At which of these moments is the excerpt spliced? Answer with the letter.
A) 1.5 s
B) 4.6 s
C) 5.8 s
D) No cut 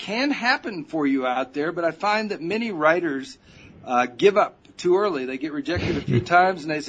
D